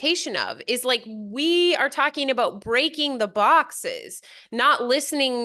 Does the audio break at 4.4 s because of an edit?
no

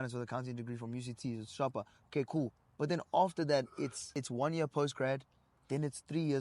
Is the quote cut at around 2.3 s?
no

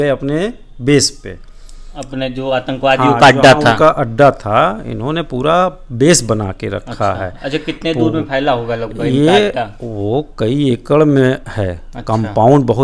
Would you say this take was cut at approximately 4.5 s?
no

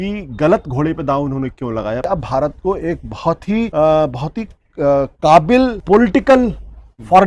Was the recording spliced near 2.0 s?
yes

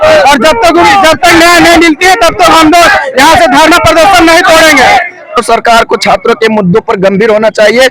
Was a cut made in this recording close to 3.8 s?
no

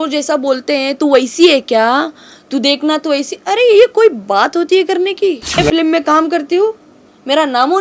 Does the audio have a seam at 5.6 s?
yes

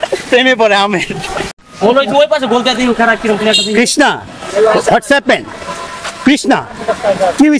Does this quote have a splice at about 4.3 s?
no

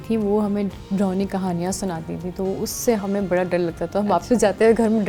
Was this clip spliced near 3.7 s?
no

